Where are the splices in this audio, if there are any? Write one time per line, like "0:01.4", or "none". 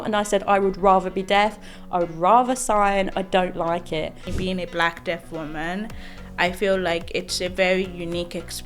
0:04.3

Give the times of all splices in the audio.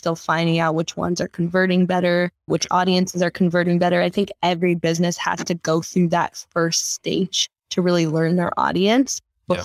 0:02.4

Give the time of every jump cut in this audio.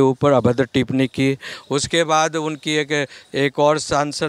none

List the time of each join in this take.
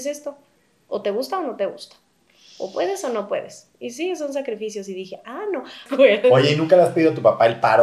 0:05.8

